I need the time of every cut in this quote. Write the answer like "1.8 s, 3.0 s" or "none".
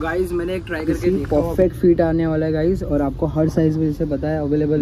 1.0 s